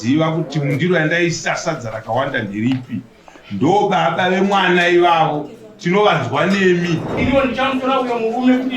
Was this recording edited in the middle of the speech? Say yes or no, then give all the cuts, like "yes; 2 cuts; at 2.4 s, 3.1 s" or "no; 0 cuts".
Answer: yes; 1 cut; at 7.1 s